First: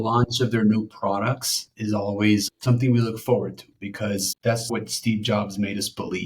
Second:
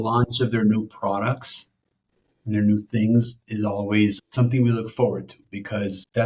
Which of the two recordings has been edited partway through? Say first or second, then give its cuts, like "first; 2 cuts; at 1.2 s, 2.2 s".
first; 2 cuts; at 1.7 s, 4.7 s